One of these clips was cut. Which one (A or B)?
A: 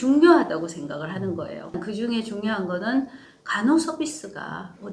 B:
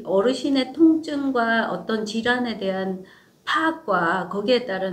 A